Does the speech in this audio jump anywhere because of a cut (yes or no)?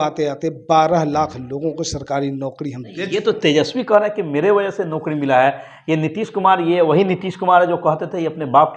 no